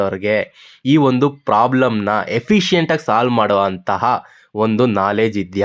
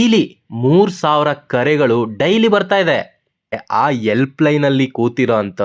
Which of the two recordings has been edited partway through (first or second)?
second